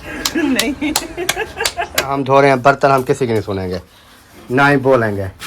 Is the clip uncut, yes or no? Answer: no